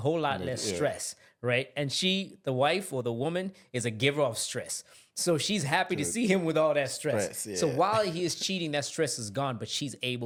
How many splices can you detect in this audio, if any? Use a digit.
0